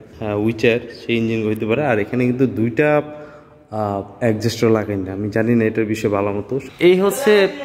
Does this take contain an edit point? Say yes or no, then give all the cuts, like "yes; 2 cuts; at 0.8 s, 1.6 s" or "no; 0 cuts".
yes; 1 cut; at 6.6 s